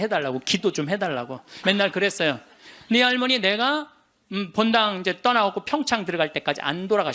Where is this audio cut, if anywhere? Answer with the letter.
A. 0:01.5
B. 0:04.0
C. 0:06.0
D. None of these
A